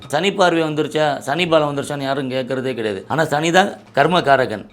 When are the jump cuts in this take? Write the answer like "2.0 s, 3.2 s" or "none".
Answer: 3.0 s, 3.8 s